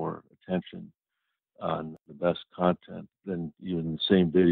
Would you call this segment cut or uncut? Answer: cut